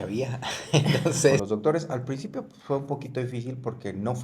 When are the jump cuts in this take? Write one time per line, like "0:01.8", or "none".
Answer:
0:01.4